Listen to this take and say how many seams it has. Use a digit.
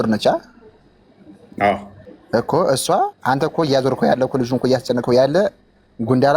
1